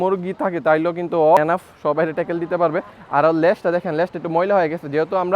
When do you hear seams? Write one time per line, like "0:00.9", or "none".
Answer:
0:01.4